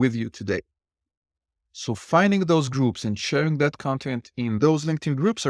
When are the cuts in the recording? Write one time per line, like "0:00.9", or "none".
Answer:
0:04.6